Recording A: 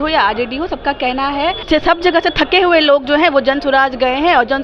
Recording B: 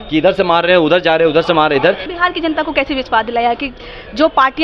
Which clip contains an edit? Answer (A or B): B